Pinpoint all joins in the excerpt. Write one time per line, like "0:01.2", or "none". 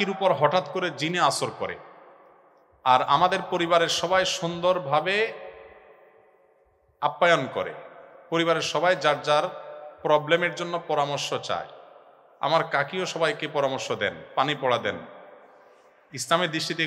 none